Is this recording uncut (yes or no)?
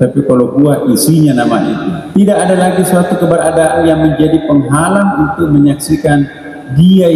no